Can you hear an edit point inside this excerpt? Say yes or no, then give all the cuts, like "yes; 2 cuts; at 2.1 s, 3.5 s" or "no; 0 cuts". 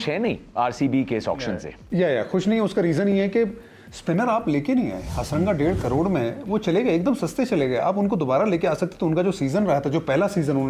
no; 0 cuts